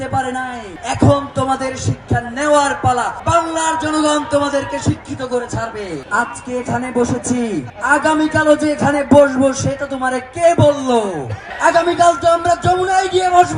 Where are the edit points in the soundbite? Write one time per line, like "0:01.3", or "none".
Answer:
0:03.2
0:06.0